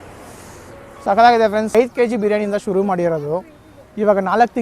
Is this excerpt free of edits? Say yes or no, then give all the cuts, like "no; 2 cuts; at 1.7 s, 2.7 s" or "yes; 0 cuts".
no; 1 cut; at 1.8 s